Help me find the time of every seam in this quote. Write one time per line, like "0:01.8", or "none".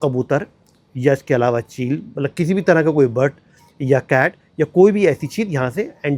none